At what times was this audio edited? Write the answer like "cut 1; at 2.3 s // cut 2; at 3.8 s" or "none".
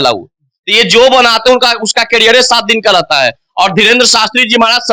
none